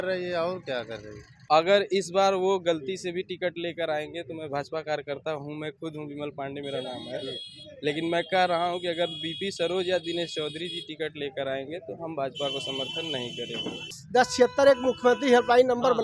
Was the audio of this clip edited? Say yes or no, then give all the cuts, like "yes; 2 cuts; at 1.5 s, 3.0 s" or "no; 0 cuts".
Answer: yes; 2 cuts; at 1.5 s, 14.0 s